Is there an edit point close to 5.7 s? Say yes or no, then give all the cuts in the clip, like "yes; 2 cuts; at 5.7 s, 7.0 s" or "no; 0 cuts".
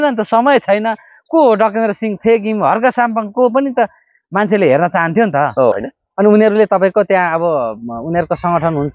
yes; 1 cut; at 5.7 s